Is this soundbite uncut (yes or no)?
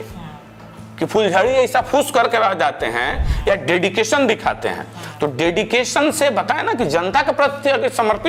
yes